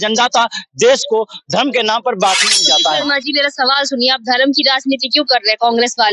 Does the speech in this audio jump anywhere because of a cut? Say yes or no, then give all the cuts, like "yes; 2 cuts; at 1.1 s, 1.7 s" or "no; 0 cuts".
yes; 1 cut; at 2.7 s